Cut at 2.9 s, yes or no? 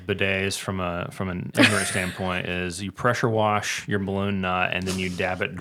no